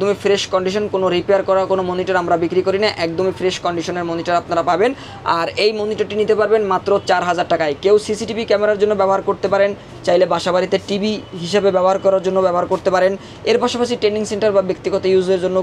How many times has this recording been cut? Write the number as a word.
zero